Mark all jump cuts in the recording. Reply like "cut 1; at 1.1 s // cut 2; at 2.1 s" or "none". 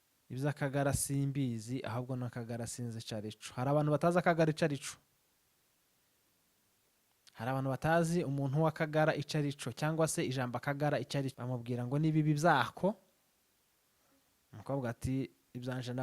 cut 1; at 11.4 s